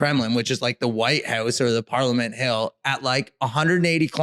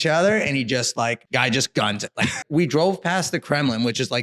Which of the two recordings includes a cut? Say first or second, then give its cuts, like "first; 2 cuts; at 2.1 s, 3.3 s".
second; 2 cuts; at 1.2 s, 2.4 s